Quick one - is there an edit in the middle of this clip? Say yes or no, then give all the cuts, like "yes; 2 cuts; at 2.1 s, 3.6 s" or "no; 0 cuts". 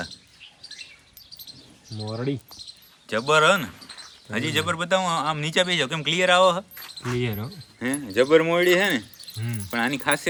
no; 0 cuts